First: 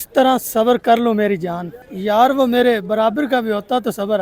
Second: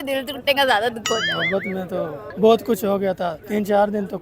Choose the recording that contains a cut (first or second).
second